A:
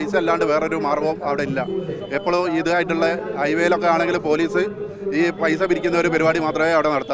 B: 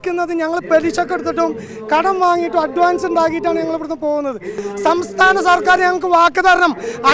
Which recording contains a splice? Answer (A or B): B